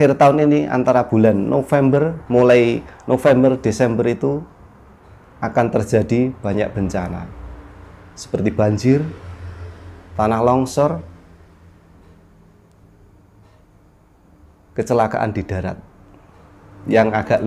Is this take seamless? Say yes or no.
yes